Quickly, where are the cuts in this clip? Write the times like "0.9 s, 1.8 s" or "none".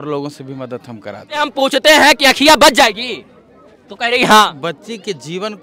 1.4 s, 4.7 s